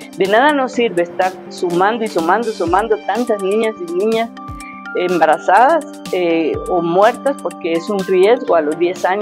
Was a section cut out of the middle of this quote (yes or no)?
no